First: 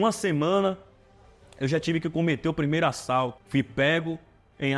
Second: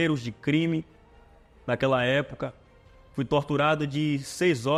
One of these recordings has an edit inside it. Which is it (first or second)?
first